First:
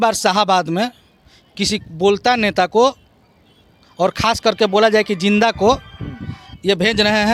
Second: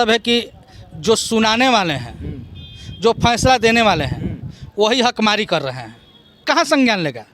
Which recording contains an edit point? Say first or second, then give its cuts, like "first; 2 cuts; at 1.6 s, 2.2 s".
second; 1 cut; at 6.4 s